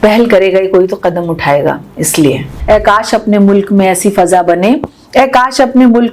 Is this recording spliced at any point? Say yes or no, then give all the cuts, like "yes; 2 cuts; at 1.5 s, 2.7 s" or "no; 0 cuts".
yes; 1 cut; at 2.5 s